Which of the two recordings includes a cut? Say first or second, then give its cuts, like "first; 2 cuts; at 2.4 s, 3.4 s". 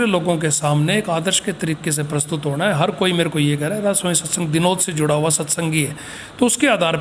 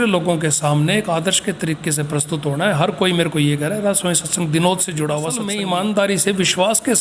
second; 1 cut; at 5.4 s